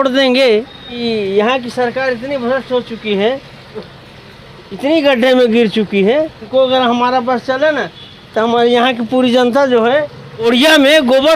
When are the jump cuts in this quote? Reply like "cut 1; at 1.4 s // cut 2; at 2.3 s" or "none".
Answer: cut 1; at 1.0 s // cut 2; at 6.4 s // cut 3; at 10.4 s